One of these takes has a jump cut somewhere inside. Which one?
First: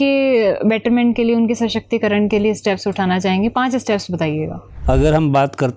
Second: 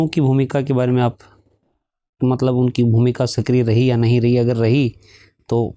first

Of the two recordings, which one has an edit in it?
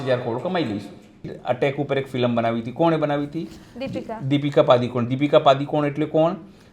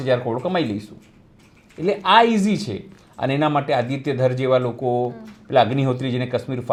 first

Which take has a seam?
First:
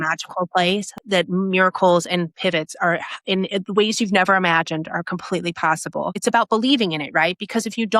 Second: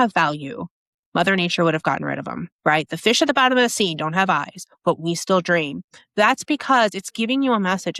first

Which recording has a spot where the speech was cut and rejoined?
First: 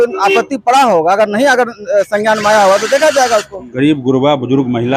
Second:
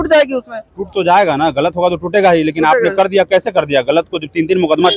first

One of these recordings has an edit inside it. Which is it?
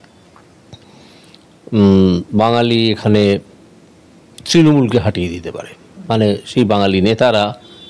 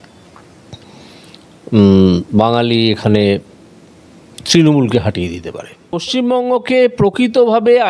second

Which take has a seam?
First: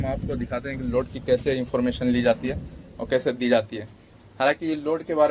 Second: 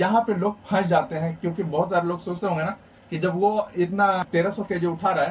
second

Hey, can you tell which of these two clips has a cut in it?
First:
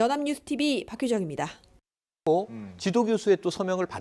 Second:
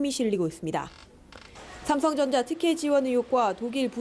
first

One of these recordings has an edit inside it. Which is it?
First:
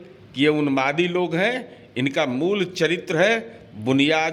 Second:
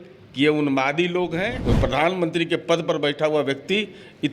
second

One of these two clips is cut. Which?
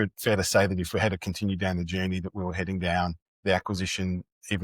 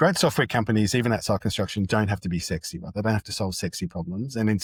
first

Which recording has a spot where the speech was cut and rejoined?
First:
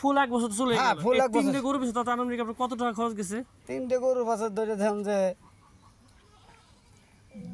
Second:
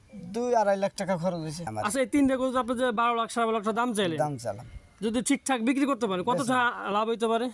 second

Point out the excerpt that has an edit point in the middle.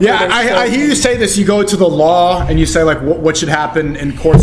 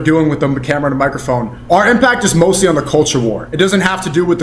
second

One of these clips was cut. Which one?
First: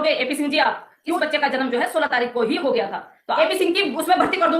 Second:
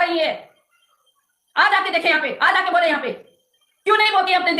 first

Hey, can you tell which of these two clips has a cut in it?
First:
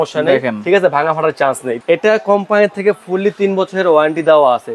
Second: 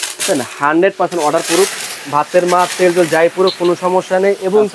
first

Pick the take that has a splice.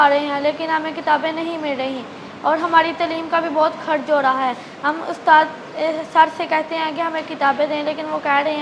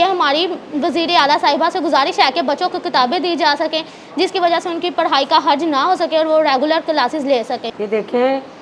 second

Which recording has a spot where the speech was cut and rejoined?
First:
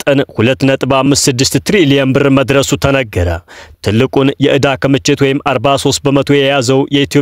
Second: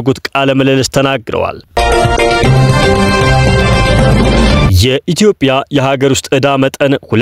second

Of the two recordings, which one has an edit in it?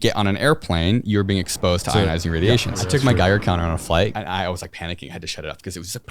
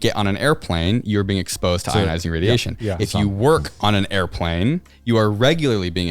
first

